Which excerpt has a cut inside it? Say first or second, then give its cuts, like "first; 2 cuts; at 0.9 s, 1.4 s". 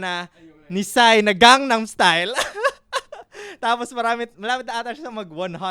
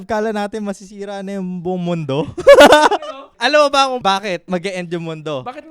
second; 2 cuts; at 3.0 s, 4.0 s